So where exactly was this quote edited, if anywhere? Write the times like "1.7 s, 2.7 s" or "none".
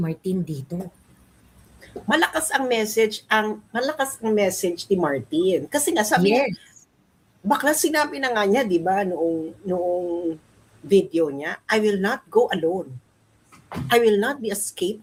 none